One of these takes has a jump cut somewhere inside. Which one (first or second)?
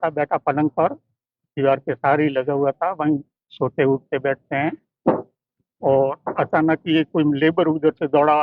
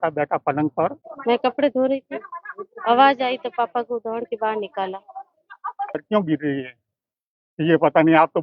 second